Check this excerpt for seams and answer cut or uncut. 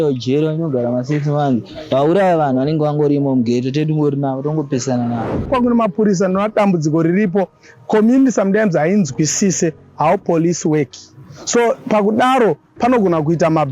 cut